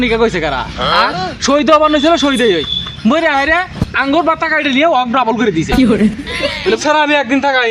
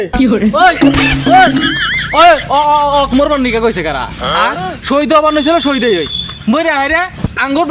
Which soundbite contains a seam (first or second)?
first